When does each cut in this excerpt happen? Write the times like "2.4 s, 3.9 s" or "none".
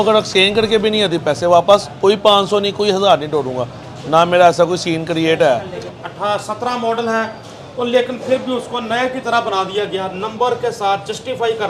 5.8 s